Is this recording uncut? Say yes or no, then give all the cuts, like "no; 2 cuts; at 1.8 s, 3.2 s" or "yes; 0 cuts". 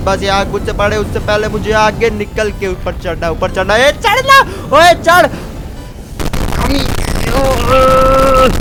yes; 0 cuts